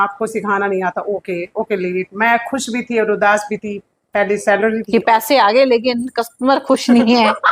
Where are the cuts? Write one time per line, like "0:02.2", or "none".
none